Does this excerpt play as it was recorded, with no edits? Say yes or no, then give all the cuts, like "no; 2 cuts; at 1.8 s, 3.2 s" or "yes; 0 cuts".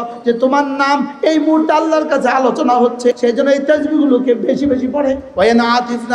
no; 2 cuts; at 3.2 s, 5.3 s